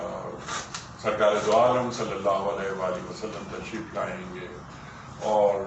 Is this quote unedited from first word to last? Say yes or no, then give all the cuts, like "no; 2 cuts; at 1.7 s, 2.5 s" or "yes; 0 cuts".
yes; 0 cuts